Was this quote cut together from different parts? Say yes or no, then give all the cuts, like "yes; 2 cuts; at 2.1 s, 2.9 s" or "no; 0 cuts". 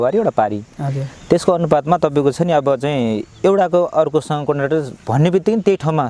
no; 0 cuts